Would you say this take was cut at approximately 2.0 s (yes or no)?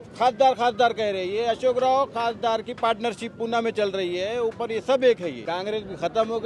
no